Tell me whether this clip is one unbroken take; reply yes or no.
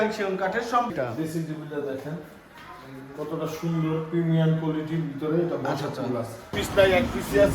no